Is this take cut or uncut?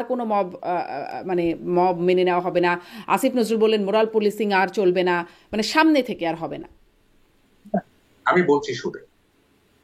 uncut